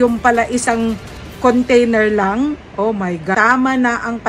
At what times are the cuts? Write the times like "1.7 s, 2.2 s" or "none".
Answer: 3.3 s